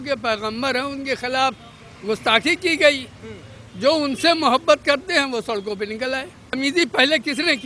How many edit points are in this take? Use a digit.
1